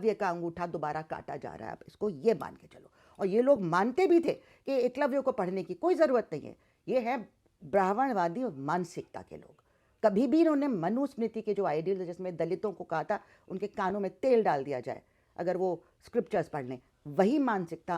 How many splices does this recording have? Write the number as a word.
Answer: zero